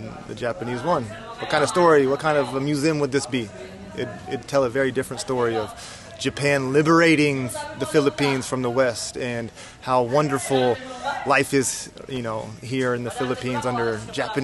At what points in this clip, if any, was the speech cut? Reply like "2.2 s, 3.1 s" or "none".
none